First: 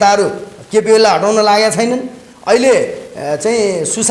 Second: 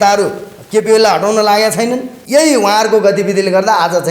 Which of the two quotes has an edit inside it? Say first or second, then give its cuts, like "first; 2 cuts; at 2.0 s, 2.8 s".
second; 1 cut; at 2.1 s